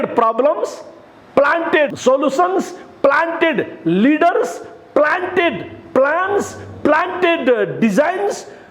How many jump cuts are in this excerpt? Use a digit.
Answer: 1